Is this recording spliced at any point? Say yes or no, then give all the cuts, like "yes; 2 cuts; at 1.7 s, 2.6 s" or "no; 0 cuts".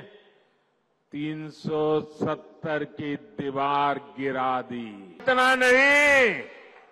yes; 1 cut; at 5.2 s